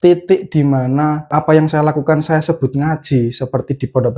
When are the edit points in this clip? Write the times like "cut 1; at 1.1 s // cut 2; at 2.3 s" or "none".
cut 1; at 1.3 s